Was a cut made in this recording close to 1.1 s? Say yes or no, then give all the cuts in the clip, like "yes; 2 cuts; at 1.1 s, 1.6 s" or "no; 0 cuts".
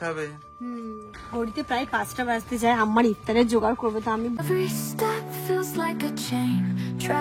no; 1 cut; at 4.4 s